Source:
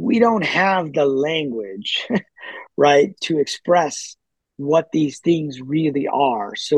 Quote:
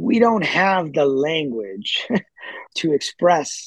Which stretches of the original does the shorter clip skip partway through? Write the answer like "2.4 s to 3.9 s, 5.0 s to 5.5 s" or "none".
2.7 s to 3.2 s